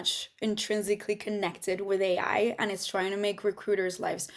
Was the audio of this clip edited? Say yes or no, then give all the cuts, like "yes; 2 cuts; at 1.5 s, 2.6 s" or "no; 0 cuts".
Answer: no; 0 cuts